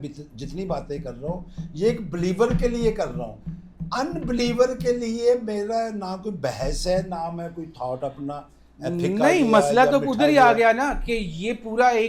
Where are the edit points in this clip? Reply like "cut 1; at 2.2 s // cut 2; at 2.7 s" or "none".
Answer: none